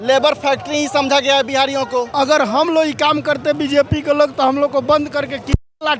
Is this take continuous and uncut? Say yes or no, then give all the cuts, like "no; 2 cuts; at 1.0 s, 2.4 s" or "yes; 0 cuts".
no; 1 cut; at 2.1 s